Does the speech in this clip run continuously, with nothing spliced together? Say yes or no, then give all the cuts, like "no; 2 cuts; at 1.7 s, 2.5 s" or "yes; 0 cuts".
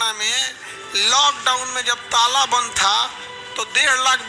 yes; 0 cuts